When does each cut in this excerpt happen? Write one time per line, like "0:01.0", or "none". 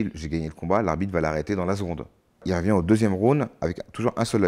0:02.4